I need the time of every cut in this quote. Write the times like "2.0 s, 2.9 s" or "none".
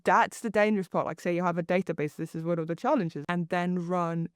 3.2 s